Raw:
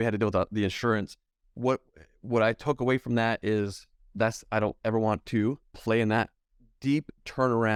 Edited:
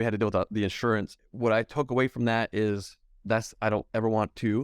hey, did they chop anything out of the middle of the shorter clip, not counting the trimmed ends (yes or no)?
yes